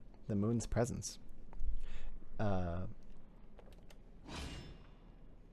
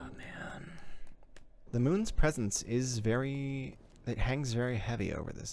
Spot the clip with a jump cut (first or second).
second